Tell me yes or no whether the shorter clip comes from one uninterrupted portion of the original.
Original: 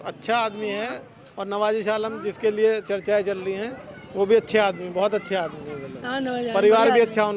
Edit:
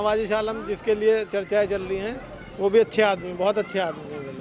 yes